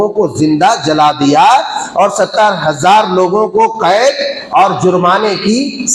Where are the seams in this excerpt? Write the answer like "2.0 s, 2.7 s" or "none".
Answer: none